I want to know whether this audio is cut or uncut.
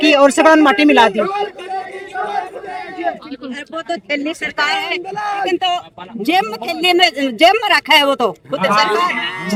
uncut